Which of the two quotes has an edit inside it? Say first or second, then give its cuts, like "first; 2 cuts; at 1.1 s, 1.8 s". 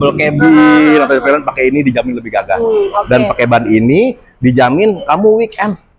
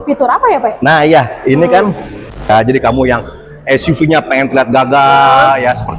second; 1 cut; at 2.5 s